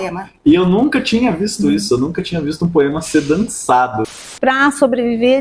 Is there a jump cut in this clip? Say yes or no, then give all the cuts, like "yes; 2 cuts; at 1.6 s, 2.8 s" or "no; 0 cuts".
yes; 1 cut; at 4.3 s